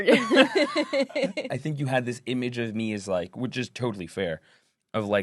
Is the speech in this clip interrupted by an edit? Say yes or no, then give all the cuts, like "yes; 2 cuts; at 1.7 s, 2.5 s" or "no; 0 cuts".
yes; 1 cut; at 1.5 s